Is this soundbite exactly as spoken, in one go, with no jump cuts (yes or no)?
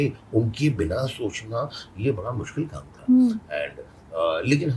yes